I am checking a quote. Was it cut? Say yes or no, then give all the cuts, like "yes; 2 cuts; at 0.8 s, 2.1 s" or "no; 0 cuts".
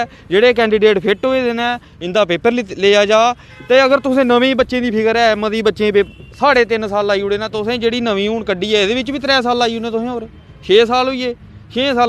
no; 0 cuts